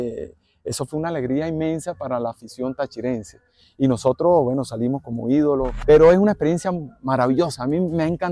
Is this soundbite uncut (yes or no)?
no